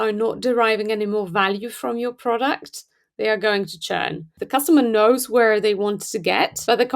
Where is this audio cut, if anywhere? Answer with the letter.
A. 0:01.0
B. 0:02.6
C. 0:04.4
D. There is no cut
C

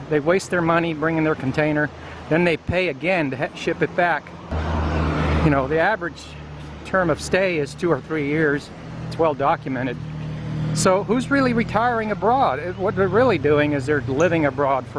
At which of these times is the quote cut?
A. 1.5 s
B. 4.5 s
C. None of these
B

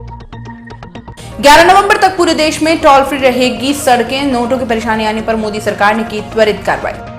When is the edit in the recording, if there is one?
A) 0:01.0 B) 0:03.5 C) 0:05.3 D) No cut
A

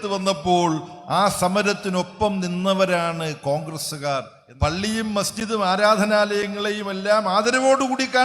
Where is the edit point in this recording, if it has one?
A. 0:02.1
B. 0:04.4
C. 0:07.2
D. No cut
B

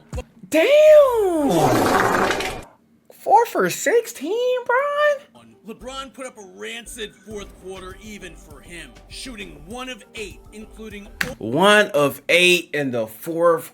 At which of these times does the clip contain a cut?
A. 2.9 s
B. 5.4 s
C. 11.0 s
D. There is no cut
B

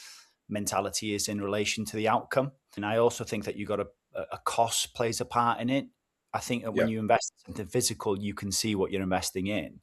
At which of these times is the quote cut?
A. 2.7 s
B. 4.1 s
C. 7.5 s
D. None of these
A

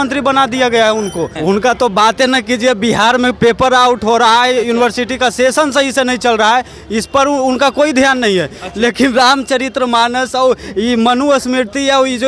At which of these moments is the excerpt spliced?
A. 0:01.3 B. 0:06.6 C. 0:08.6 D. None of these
A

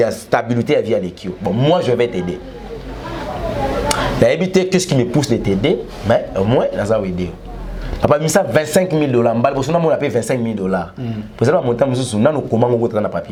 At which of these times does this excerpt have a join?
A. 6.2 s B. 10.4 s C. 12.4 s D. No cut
D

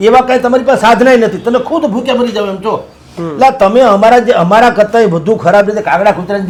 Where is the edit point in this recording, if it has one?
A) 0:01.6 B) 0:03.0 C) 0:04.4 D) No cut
D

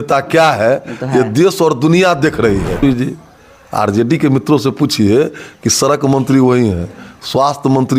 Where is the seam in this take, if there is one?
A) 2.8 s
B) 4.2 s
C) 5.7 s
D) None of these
A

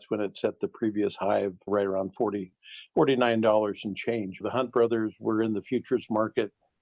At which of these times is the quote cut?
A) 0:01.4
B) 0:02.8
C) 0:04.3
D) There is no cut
C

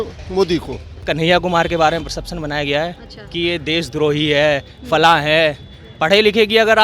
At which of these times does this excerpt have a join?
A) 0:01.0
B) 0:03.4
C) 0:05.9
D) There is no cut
A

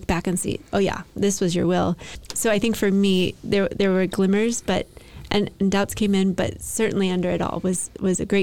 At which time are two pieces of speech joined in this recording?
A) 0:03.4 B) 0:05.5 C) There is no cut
C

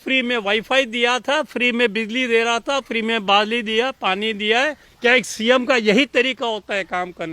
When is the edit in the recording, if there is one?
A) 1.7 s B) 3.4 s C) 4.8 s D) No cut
C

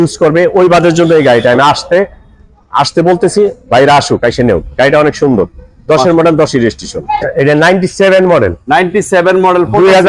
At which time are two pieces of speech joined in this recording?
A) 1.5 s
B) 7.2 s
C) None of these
B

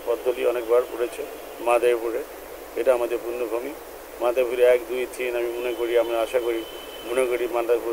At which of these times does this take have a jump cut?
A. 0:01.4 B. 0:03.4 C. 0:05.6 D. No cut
D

